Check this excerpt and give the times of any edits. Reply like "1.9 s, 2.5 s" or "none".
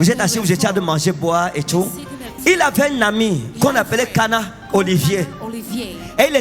2.2 s